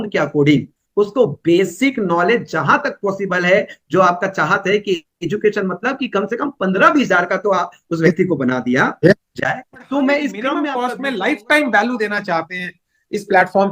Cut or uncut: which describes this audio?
cut